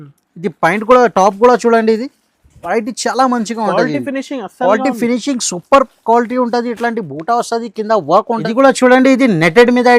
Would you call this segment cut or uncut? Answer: cut